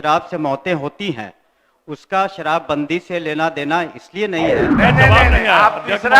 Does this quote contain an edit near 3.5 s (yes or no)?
no